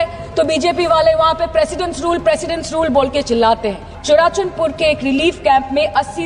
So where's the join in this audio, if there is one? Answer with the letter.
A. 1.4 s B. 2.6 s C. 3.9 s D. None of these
C